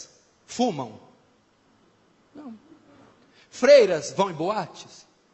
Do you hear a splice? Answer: yes; 1 cut; at 0.9 s

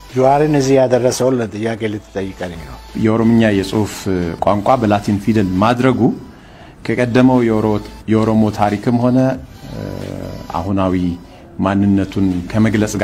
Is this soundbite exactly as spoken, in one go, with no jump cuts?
no; 1 cut; at 2.9 s

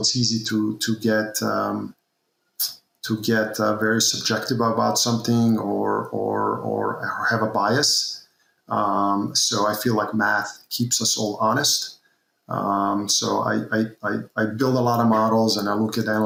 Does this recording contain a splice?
no; 0 cuts

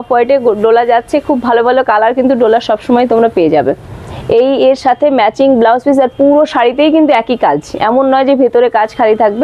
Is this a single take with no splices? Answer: yes; 0 cuts

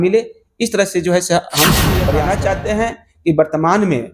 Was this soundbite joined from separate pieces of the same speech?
yes; 1 cut; at 2.1 s

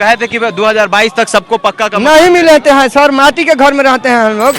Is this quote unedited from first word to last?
yes; 0 cuts

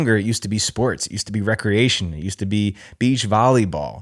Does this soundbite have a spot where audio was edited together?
no; 0 cuts

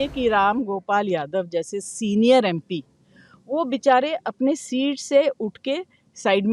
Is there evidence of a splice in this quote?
no; 0 cuts

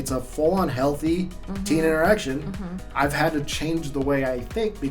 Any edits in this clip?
yes; 1 cut; at 2.8 s

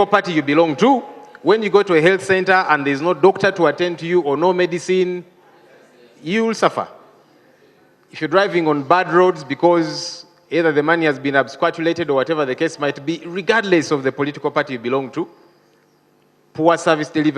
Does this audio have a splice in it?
no; 0 cuts

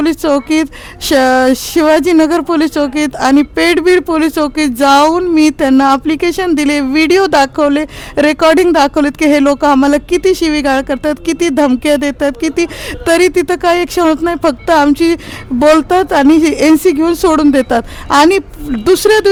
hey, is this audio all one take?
yes; 0 cuts

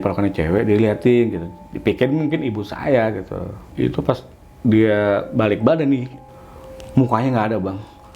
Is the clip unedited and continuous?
no; 2 cuts; at 3.6 s, 6.2 s

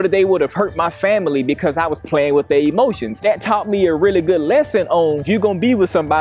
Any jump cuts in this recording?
no; 0 cuts

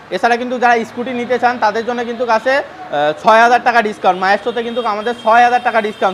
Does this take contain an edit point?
no; 0 cuts

